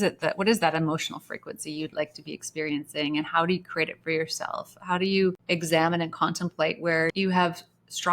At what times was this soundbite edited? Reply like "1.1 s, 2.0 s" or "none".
5.4 s, 7.1 s